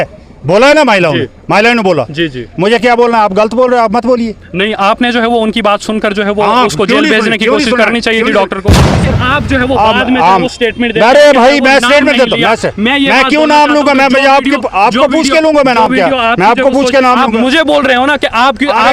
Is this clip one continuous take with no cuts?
no; 1 cut; at 9.0 s

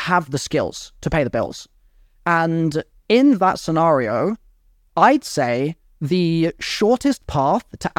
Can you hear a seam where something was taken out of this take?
no; 0 cuts

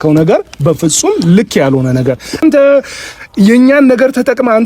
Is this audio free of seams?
no; 1 cut; at 2.4 s

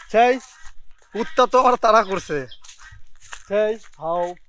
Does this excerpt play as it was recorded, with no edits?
no; 1 cut; at 2.8 s

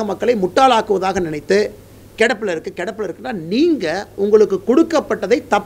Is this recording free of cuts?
yes; 0 cuts

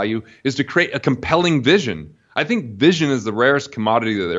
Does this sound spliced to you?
no; 0 cuts

